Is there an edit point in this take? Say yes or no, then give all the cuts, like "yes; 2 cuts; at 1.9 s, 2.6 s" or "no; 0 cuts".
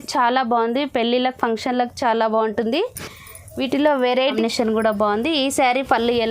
yes; 1 cut; at 4.2 s